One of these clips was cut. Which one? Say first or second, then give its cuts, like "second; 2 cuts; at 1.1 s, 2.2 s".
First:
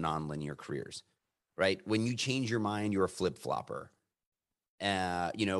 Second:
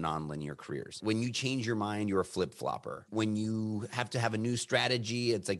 second; 2 cuts; at 1.0 s, 3.1 s